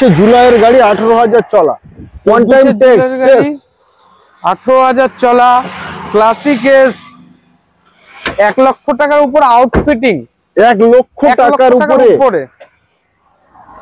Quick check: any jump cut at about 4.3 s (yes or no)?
no